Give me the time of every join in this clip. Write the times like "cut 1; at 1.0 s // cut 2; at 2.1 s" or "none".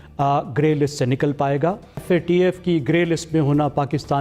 cut 1; at 2.0 s